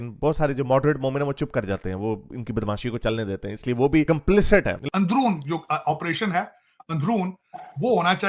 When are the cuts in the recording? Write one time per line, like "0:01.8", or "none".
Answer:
0:04.8